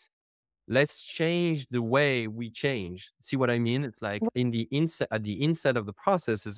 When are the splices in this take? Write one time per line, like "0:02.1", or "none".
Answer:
0:04.3